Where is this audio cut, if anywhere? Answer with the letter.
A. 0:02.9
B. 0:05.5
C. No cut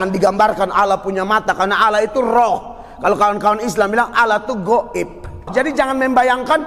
B